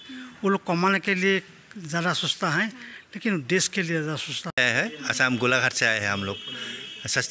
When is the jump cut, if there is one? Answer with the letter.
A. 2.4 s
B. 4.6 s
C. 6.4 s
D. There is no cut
B